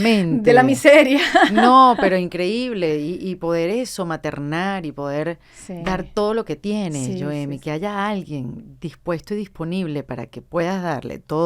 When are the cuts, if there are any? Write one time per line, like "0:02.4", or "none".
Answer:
none